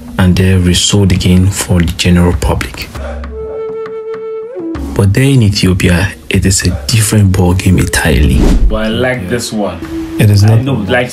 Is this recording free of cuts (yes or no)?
no